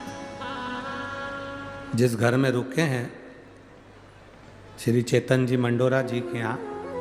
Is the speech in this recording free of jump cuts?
no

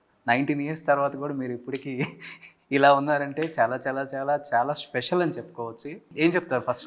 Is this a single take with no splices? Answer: no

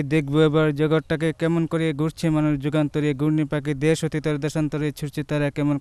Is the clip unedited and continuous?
yes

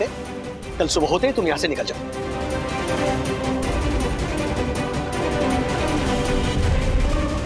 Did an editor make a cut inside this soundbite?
yes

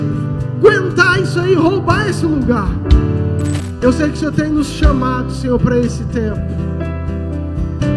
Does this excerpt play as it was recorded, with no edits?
no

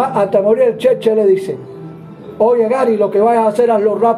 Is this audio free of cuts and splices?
yes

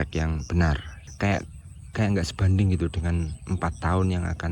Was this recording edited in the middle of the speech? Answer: yes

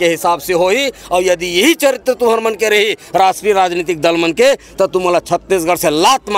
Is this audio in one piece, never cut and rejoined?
yes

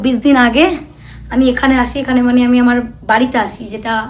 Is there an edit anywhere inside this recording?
no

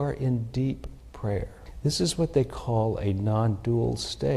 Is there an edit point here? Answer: yes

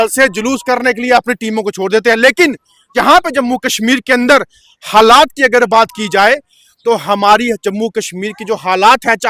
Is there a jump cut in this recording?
yes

